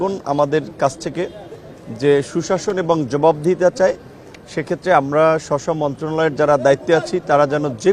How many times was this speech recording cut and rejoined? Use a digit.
0